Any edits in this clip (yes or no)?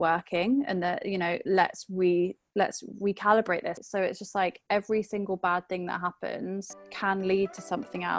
yes